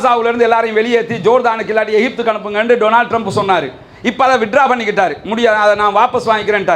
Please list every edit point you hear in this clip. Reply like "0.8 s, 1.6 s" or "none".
none